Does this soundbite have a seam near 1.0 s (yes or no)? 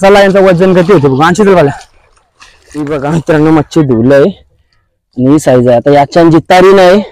no